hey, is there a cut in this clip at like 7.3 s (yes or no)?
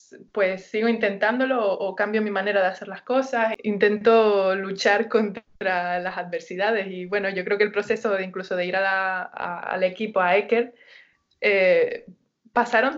no